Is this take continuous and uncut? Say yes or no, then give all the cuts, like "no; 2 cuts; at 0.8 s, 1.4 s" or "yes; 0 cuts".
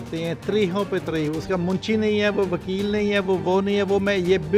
yes; 0 cuts